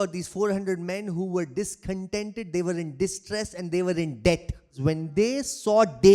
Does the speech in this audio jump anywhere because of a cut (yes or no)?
yes